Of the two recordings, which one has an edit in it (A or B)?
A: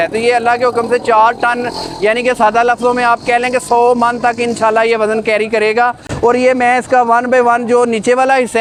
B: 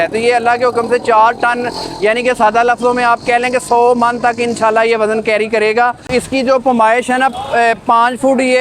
B